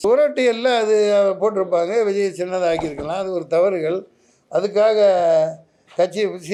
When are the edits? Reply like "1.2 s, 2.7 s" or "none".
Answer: none